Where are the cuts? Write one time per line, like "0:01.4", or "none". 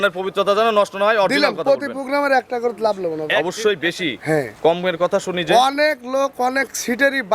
0:03.3